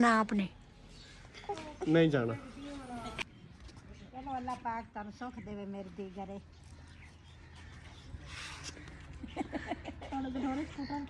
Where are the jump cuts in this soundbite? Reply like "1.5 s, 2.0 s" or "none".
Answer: 3.1 s

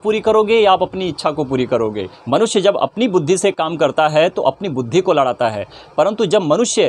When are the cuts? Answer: 2.1 s

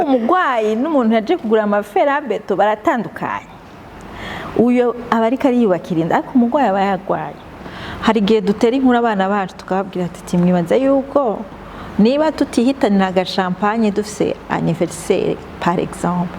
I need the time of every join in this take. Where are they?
7.6 s

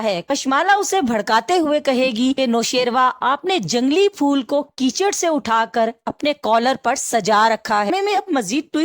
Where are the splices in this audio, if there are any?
7.9 s

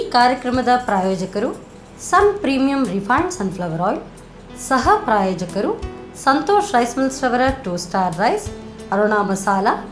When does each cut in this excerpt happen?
none

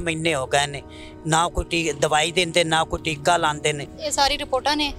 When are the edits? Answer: 3.9 s

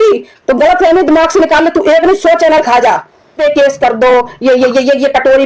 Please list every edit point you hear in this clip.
3.3 s

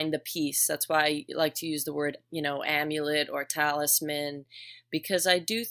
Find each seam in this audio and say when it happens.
none

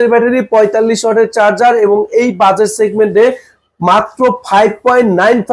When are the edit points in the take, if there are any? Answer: none

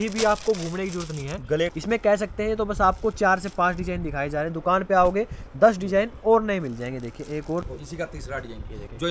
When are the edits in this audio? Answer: 1.7 s, 7.7 s

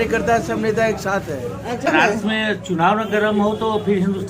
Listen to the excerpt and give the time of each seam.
1.9 s

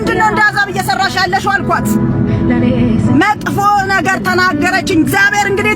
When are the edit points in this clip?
none

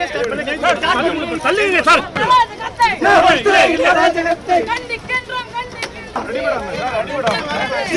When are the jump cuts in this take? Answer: none

